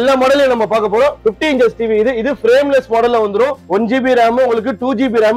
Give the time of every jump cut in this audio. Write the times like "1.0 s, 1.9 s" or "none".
1.2 s, 3.6 s